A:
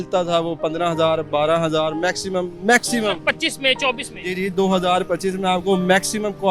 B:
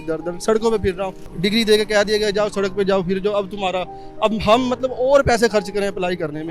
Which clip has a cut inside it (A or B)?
B